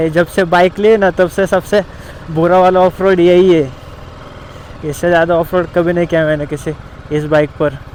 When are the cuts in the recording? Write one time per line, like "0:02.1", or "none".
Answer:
none

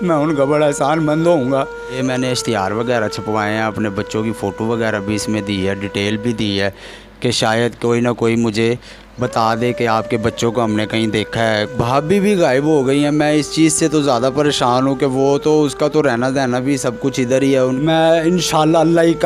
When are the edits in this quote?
0:01.9
0:11.7
0:17.8

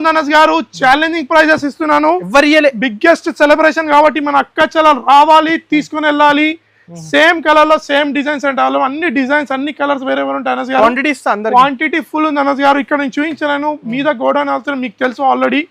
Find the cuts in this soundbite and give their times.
none

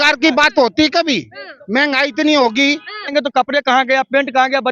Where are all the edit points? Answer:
0:03.1

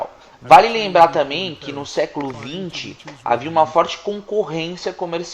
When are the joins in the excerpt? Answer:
0:02.0

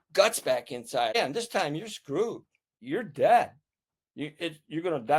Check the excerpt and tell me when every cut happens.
0:01.1
0:02.7

